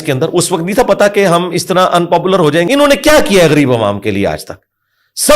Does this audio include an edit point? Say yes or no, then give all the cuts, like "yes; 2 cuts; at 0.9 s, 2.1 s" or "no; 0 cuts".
yes; 1 cut; at 2.6 s